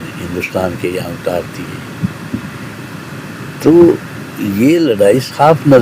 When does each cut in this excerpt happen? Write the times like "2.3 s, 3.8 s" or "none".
none